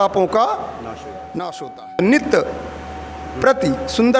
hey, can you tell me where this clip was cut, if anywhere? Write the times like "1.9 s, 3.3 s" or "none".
2.0 s